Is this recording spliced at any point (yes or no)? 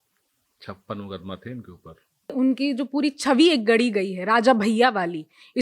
yes